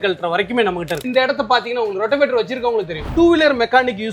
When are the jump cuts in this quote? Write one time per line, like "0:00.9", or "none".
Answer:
0:01.0
0:03.0